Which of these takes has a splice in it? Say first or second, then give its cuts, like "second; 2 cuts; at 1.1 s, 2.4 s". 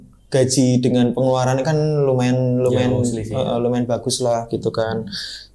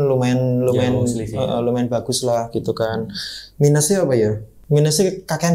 second; 1 cut; at 4.5 s